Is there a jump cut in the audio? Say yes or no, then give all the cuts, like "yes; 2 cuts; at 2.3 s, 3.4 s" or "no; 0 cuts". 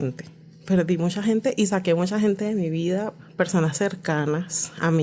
yes; 1 cut; at 3.2 s